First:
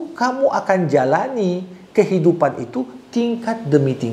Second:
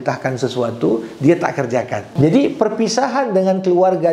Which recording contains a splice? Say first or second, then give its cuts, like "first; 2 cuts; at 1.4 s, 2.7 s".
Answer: second; 1 cut; at 2.1 s